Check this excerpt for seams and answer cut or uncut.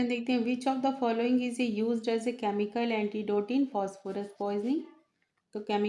uncut